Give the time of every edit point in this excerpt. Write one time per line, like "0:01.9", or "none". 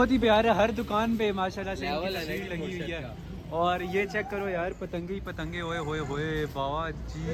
none